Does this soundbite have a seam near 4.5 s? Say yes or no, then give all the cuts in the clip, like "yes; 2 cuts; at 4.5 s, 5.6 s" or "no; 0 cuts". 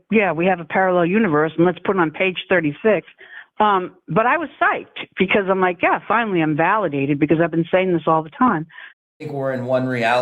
no; 1 cut; at 9.2 s